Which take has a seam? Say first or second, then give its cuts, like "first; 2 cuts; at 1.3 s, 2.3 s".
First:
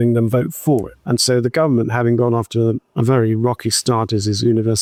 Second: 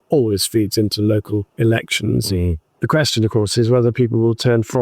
second; 1 cut; at 2.7 s